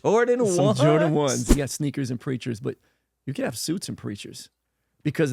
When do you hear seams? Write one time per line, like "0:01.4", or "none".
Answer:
0:01.5